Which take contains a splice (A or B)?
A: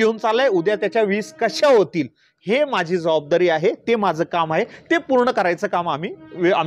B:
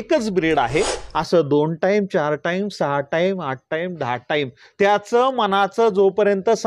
B